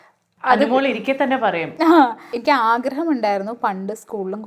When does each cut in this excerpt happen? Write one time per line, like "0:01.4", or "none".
0:02.3